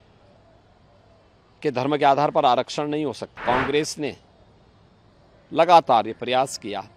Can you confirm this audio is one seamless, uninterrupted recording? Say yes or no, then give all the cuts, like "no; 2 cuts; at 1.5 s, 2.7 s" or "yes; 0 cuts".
no; 1 cut; at 3.3 s